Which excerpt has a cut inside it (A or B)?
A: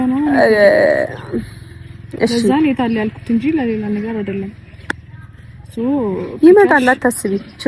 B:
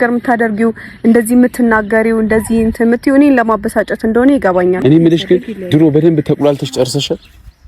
B